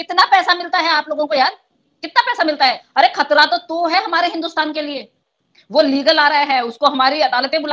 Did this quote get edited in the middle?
yes; 1 cut; at 2.8 s

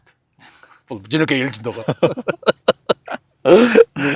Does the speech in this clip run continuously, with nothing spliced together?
yes; 0 cuts

